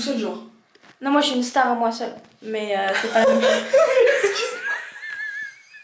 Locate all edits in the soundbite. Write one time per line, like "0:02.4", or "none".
none